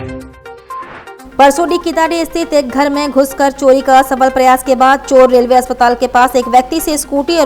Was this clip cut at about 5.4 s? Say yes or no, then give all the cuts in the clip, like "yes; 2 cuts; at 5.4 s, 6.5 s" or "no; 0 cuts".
no; 1 cut; at 1.2 s